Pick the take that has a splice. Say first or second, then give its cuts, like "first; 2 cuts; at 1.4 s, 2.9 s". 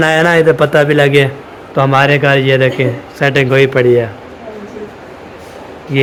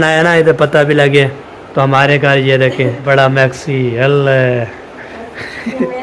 second; 1 cut; at 3.0 s